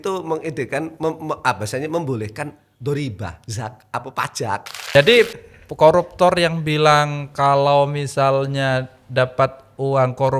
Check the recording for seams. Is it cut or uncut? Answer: cut